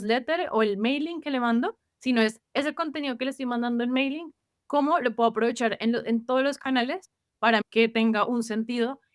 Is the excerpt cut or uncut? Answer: cut